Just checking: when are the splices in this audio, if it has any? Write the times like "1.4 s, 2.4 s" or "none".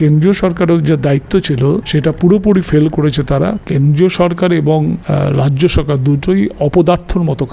1.9 s, 3.6 s, 5.0 s

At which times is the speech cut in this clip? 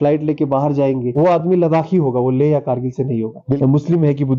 1.1 s, 3.6 s

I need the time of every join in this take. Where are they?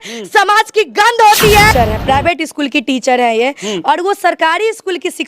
1.7 s

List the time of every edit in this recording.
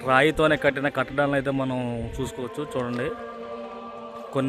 none

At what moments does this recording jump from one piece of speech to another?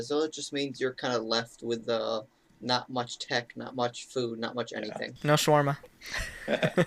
5.1 s

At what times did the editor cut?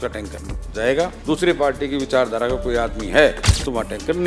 1.2 s

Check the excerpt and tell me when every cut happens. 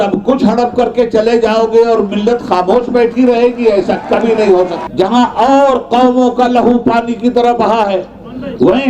4.8 s

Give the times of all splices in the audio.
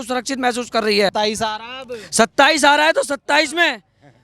1.1 s

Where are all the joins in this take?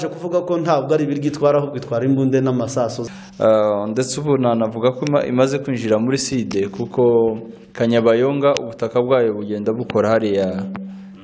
3.0 s

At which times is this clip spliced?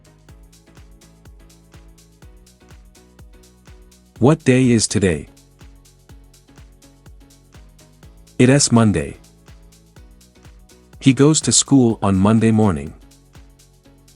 2.9 s, 4.2 s, 5.3 s, 6.9 s, 8.4 s, 9.3 s, 11.0 s, 13.0 s

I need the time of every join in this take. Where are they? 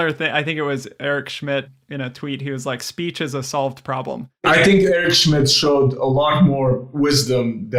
none

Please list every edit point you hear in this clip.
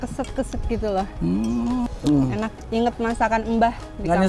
1.9 s

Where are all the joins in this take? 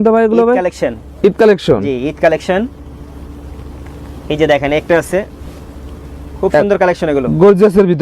none

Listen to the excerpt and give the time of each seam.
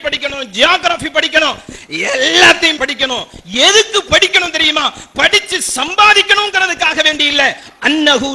2.7 s

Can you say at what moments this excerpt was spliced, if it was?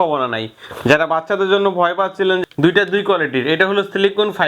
2.4 s

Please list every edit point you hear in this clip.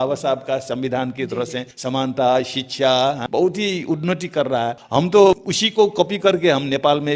1.7 s, 3.2 s, 4.8 s, 5.5 s

